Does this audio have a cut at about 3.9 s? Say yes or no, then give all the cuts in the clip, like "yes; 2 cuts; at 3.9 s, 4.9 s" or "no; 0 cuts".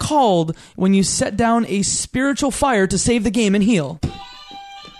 yes; 1 cut; at 3.9 s